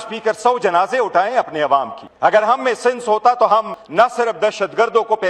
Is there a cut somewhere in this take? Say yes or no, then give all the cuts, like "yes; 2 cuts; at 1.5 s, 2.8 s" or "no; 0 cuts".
yes; 2 cuts; at 2.0 s, 3.8 s